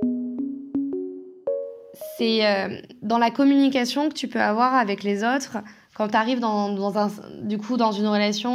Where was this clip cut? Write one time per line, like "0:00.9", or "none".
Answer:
0:01.6